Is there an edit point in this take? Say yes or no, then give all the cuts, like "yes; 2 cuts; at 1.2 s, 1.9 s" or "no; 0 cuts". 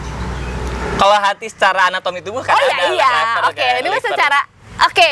no; 0 cuts